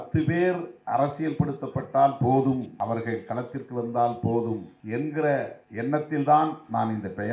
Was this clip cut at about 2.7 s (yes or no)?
yes